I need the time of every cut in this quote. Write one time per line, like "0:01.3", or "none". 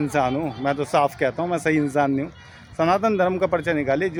none